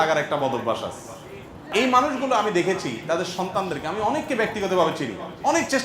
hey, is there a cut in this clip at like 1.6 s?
yes; 1 cut; at 1.6 s

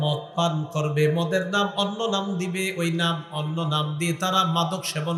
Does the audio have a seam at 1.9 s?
no; 0 cuts

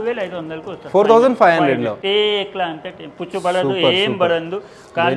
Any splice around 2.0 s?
no; 0 cuts

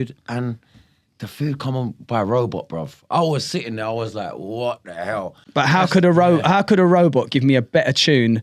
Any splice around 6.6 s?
no; 1 cut; at 5.4 s

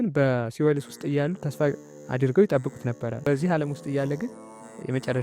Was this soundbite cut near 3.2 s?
yes; 1 cut; at 3.2 s

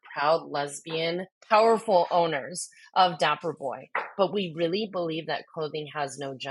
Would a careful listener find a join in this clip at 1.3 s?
yes; 1 cut; at 1.3 s

